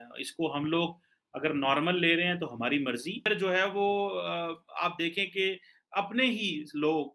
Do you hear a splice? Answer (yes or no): yes